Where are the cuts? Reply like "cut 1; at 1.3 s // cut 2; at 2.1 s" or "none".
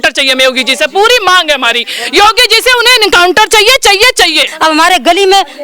cut 1; at 4.5 s